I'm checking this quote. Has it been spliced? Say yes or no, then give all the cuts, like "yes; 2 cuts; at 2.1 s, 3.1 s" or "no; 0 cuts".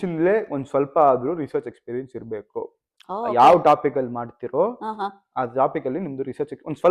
no; 0 cuts